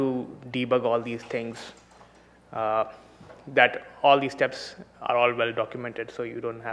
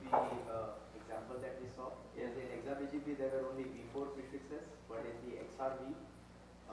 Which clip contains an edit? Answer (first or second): second